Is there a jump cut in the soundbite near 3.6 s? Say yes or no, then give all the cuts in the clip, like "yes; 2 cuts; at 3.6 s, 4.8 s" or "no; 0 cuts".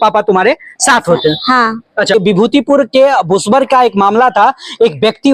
no; 1 cut; at 2.1 s